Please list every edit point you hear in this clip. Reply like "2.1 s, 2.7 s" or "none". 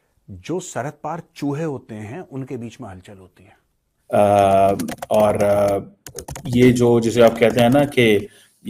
3.9 s

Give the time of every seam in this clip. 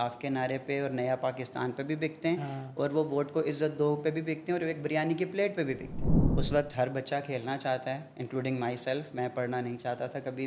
6.2 s

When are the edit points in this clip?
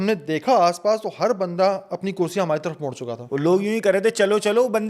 3.1 s

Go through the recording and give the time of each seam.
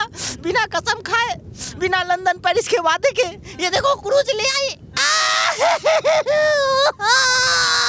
none

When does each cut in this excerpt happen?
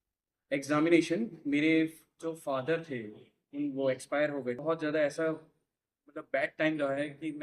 4.6 s

